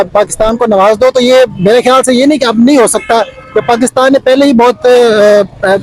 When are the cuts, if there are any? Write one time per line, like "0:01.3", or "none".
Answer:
none